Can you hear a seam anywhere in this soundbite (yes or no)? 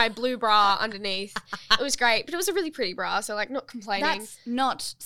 no